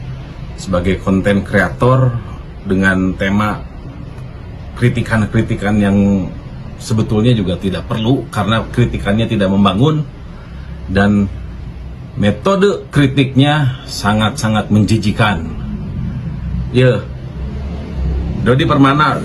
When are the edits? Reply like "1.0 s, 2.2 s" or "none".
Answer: none